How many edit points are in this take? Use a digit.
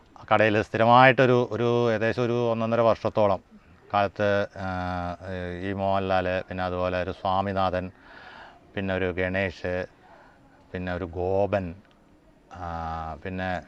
0